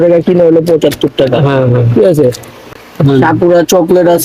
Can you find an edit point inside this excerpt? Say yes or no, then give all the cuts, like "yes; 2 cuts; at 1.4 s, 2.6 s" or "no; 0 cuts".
yes; 1 cut; at 2.7 s